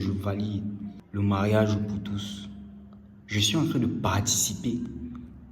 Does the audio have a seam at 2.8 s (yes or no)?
no